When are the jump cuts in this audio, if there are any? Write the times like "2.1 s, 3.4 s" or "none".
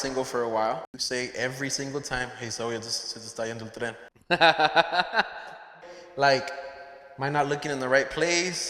1.0 s, 4.1 s, 5.7 s